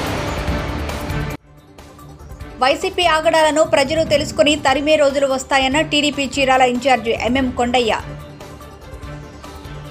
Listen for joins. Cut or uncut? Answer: uncut